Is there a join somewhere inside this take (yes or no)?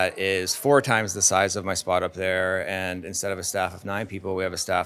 no